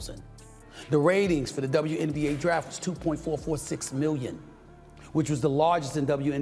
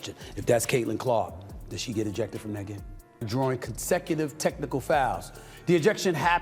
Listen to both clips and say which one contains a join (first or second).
second